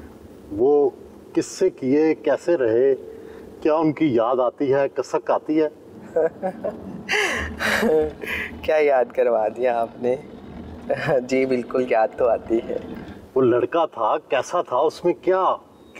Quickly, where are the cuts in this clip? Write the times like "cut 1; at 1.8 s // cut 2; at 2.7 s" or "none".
none